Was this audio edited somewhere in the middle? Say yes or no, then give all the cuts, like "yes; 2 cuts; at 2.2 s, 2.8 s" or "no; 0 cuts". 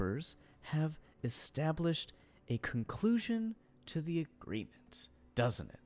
no; 0 cuts